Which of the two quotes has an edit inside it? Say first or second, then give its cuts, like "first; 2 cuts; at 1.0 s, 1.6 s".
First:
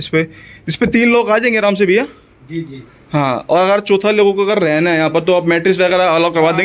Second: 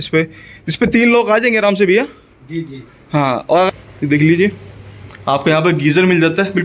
second; 1 cut; at 3.7 s